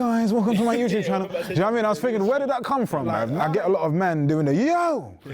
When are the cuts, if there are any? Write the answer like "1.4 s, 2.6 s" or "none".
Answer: 3.4 s